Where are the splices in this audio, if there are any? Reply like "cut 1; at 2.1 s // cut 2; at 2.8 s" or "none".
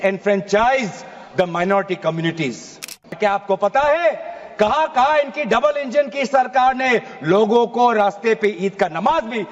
cut 1; at 3.1 s

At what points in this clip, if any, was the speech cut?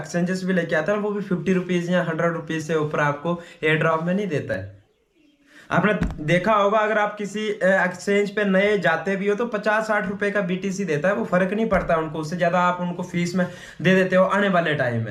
none

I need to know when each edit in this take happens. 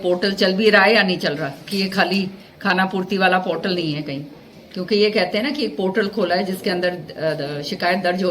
none

